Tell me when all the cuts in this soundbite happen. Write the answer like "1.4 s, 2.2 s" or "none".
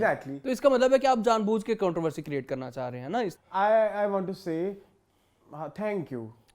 3.3 s